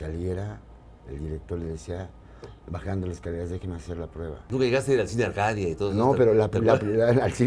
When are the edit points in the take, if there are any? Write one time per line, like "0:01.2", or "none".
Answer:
0:04.4